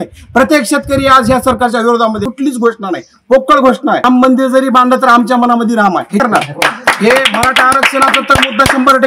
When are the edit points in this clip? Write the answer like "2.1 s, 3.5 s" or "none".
2.3 s, 6.2 s